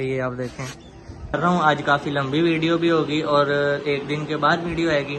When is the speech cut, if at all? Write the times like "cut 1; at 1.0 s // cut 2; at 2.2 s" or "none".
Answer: cut 1; at 1.4 s